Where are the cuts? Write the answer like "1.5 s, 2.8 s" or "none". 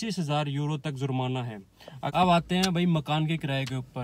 2.1 s